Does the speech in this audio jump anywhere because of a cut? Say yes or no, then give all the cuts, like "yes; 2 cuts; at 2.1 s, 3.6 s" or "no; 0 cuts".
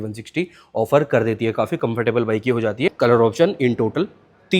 yes; 1 cut; at 2.9 s